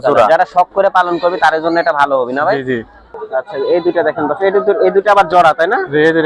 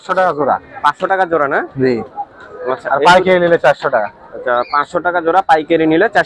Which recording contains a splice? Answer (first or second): first